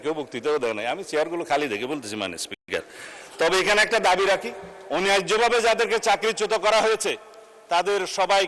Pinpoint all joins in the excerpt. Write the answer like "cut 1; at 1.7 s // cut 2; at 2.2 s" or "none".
none